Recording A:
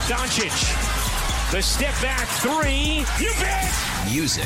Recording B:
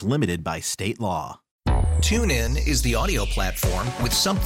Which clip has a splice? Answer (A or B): B